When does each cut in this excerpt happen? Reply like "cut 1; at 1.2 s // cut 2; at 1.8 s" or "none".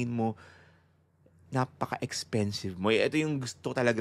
none

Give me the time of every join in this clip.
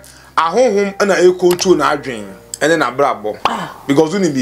none

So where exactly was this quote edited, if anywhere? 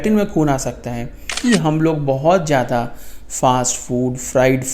cut 1; at 1.4 s

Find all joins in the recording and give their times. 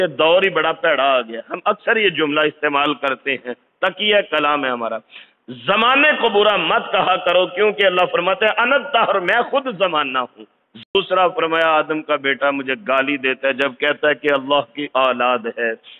cut 1; at 10.8 s

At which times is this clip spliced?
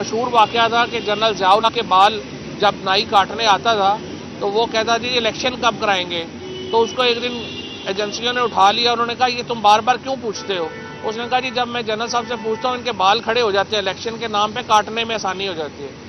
cut 1; at 1.7 s

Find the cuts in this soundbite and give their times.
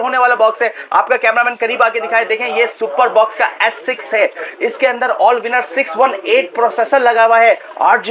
none

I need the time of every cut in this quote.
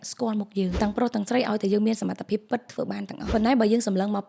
cut 1; at 0.7 s // cut 2; at 3.3 s

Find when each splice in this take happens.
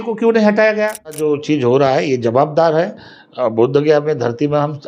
cut 1; at 1.2 s

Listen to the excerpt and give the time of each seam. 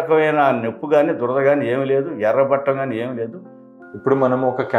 cut 1; at 3.6 s

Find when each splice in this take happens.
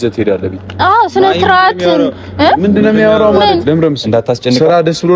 cut 1; at 3.6 s

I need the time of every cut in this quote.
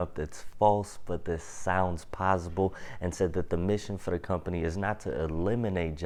none

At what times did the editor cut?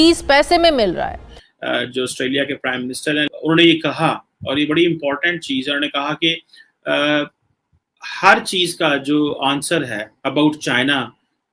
cut 1; at 1.2 s // cut 2; at 3.3 s

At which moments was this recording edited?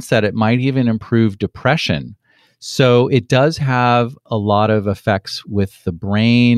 none

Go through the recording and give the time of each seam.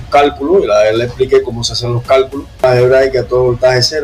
cut 1; at 2.6 s

